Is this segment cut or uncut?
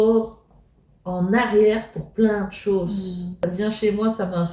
cut